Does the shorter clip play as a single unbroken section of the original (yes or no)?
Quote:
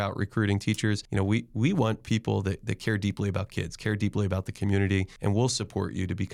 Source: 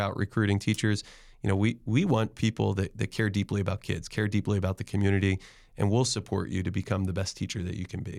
no